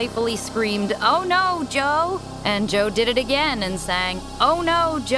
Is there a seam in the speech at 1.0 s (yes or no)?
no